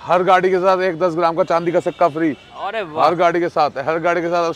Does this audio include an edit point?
no; 0 cuts

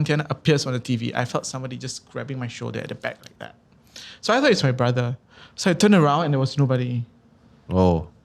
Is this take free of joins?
yes; 0 cuts

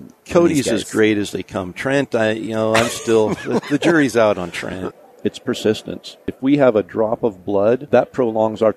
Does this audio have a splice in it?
yes; 3 cuts; at 4.9 s, 6.3 s, 7.8 s

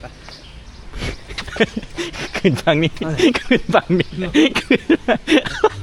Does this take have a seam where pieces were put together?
no; 0 cuts

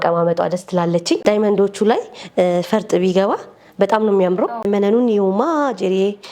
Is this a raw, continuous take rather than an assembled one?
no; 2 cuts; at 1.2 s, 4.7 s

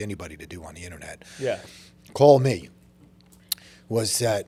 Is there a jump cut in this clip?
no; 0 cuts

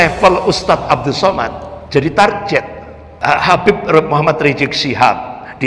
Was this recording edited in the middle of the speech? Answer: yes; 1 cut; at 3.4 s

